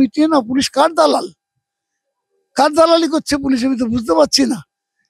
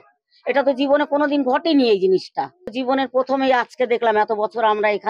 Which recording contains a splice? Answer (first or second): second